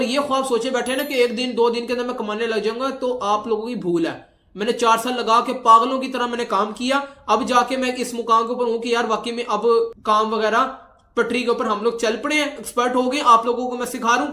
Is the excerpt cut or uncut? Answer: uncut